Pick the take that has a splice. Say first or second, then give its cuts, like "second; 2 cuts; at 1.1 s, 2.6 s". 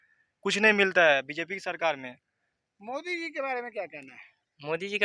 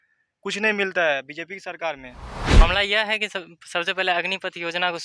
second; 1 cut; at 2.6 s